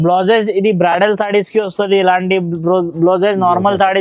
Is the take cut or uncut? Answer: uncut